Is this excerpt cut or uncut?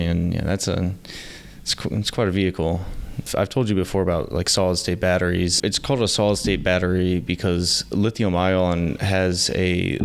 cut